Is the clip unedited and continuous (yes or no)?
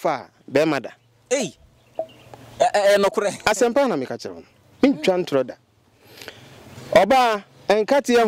yes